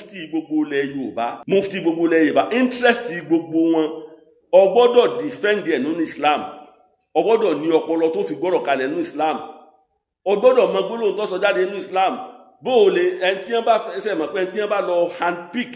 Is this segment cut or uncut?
cut